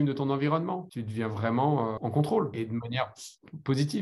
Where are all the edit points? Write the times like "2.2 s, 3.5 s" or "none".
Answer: 1.0 s, 2.5 s